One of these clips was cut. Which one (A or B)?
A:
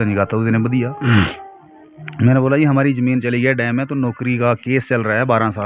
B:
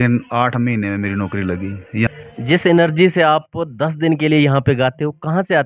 B